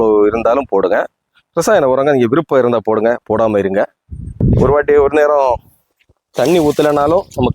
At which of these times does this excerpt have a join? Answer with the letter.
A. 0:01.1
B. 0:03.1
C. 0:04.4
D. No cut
C